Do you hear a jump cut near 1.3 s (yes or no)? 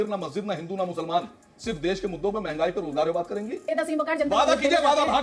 no